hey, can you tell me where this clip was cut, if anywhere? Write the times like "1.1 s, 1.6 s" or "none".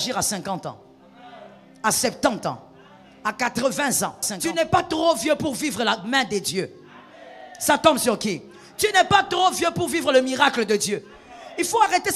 4.4 s